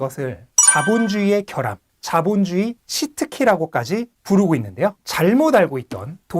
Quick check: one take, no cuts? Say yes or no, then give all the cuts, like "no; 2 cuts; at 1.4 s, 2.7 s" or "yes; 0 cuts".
no; 1 cut; at 5.0 s